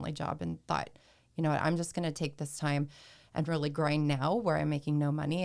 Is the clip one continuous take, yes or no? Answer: yes